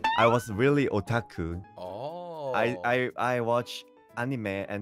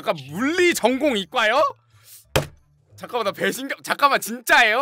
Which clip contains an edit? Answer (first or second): first